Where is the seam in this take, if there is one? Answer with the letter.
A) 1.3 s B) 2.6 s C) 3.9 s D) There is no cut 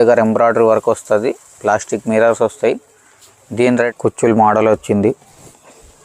C